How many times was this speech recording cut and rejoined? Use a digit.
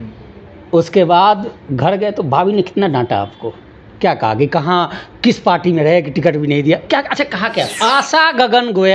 1